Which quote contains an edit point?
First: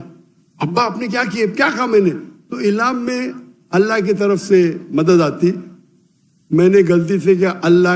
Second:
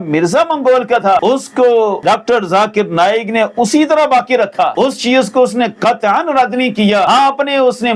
second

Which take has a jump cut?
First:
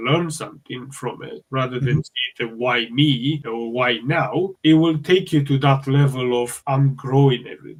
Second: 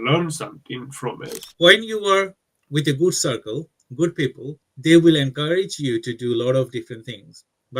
second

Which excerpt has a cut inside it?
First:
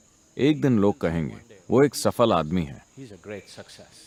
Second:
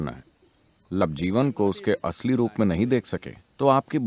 second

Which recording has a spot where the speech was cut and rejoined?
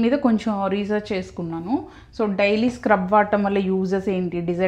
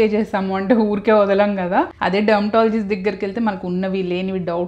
second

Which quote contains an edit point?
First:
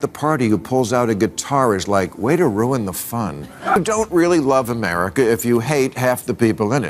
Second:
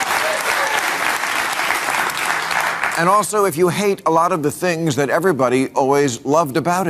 first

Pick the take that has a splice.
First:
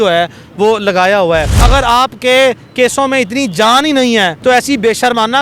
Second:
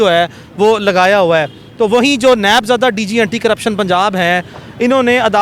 first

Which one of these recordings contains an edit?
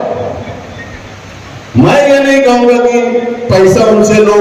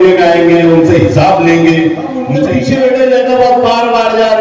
second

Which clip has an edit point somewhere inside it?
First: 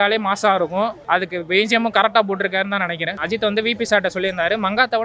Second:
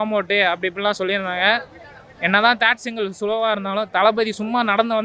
first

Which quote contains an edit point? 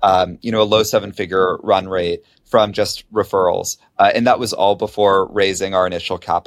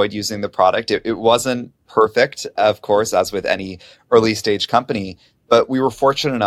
second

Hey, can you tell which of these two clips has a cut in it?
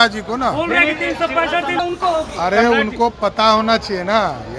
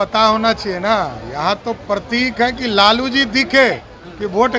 first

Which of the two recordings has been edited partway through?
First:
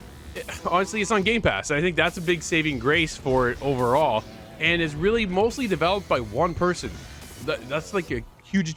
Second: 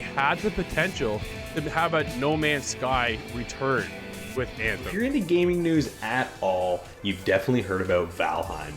second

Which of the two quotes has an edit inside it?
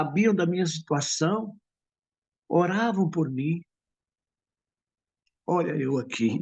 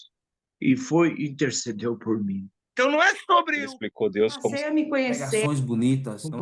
second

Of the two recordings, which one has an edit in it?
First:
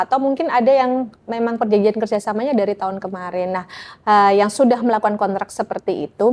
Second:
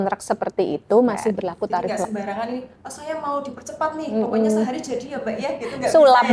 second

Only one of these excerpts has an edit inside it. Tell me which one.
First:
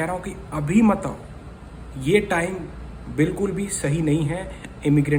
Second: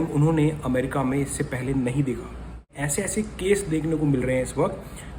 second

